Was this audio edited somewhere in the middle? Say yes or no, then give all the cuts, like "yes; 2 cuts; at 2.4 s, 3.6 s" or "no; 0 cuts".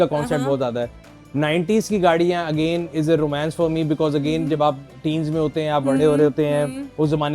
no; 0 cuts